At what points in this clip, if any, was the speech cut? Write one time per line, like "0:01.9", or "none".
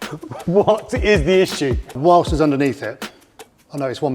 0:02.0